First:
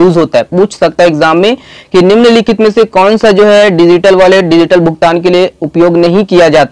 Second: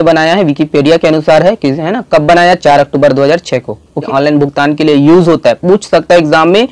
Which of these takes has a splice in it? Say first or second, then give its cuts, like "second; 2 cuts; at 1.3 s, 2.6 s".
second; 1 cut; at 4.1 s